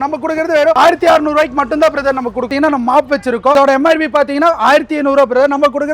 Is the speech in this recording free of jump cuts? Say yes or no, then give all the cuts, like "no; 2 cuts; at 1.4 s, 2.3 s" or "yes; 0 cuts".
no; 3 cuts; at 0.8 s, 2.5 s, 3.5 s